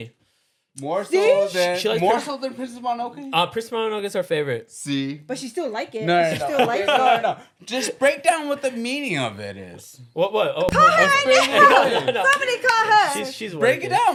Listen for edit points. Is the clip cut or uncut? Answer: uncut